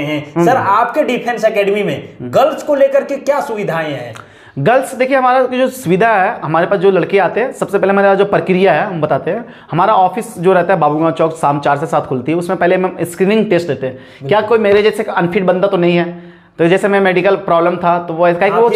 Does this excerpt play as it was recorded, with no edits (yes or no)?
yes